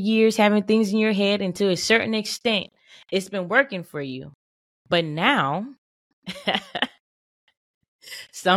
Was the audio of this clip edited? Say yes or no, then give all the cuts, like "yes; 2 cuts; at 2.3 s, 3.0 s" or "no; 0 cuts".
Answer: no; 0 cuts